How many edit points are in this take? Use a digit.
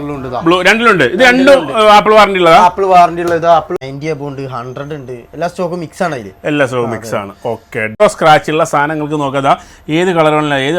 2